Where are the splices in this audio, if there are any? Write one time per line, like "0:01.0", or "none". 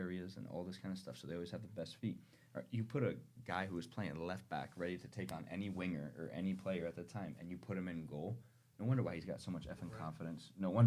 none